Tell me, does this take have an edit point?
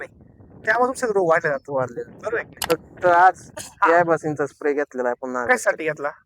yes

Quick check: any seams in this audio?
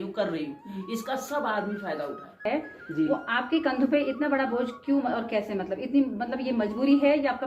yes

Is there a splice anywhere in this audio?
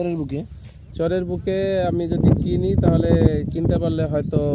no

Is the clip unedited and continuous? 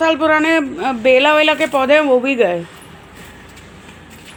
yes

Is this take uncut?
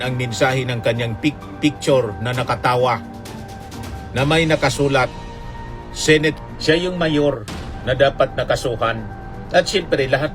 no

